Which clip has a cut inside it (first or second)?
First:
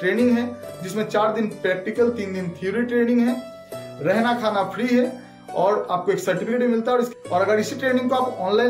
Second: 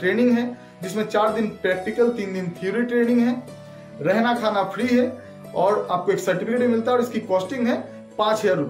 first